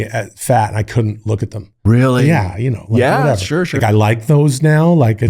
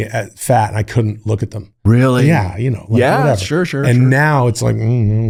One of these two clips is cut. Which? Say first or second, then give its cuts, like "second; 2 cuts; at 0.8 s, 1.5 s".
first; 1 cut; at 3.8 s